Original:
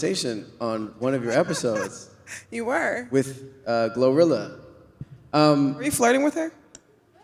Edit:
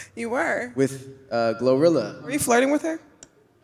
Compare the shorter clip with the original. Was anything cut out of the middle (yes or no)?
yes